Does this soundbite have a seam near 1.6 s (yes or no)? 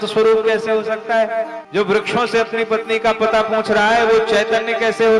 yes